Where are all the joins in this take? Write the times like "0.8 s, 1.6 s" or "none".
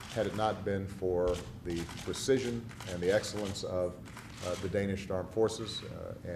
2.4 s

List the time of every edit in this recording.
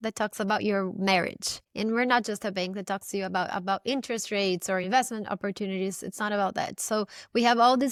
none

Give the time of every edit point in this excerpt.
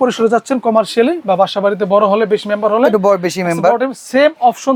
none

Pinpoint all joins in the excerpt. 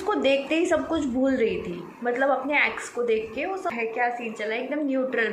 3.7 s

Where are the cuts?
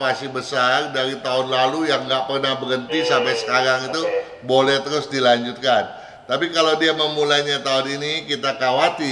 none

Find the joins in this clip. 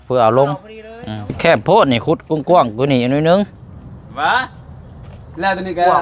1.4 s

